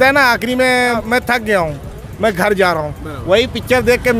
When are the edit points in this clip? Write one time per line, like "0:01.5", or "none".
0:01.0